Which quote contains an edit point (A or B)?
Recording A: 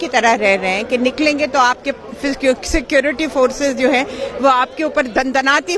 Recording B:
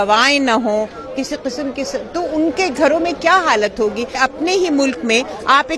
B